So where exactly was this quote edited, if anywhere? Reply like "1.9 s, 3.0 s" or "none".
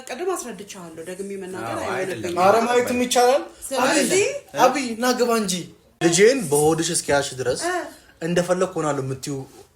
5.8 s